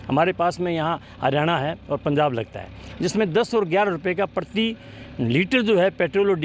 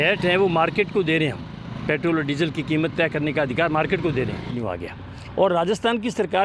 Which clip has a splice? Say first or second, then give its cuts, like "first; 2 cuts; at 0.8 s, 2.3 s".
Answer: second; 1 cut; at 4.5 s